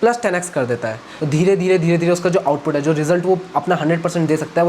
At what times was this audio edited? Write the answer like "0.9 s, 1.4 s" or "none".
1.1 s

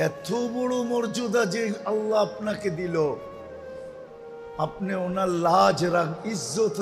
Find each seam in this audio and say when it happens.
3.2 s, 4.5 s

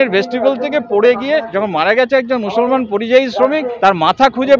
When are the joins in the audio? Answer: none

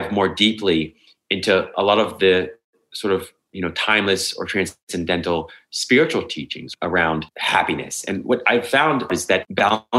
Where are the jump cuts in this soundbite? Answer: 7.1 s, 9.1 s

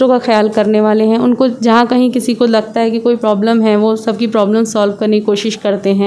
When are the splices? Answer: none

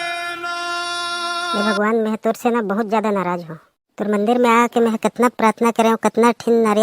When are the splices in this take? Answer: 1.5 s

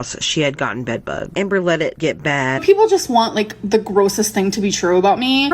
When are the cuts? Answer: 1.3 s, 2.6 s

